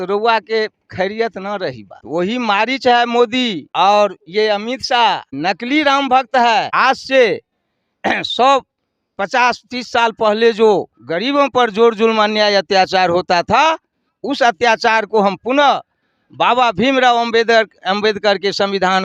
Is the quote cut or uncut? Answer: cut